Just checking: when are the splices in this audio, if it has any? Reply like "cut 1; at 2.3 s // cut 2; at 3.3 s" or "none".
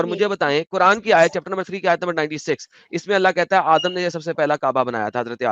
none

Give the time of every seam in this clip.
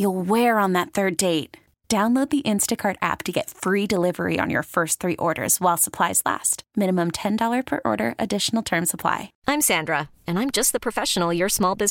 cut 1; at 9.3 s

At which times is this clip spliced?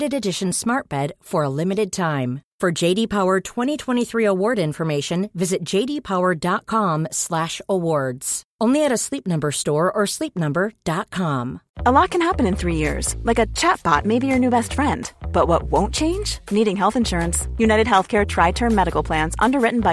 cut 1; at 11.6 s

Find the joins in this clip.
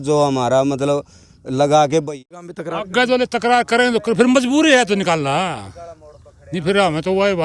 cut 1; at 2.4 s

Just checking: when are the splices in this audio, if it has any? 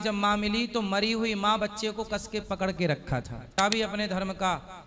cut 1; at 3.5 s

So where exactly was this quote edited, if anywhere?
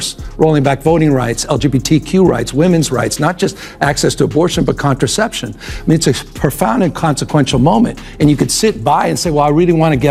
none

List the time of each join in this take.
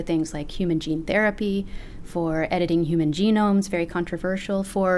none

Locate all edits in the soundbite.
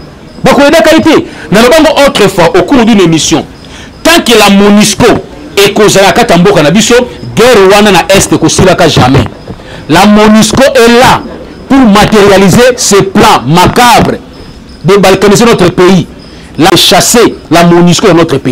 cut 1; at 16.7 s

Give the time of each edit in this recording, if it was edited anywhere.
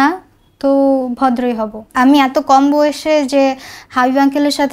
cut 1; at 1.9 s

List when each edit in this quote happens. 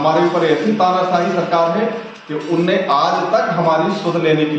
none

